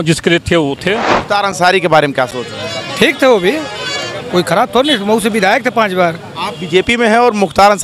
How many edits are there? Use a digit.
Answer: 1